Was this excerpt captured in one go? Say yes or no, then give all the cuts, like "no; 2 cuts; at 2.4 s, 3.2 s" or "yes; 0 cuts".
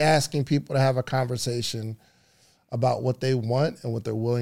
yes; 0 cuts